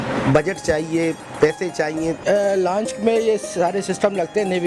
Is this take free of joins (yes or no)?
no